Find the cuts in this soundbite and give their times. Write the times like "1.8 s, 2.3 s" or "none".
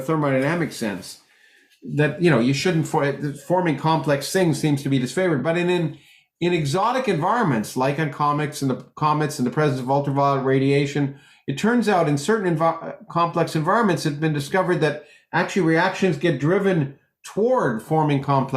none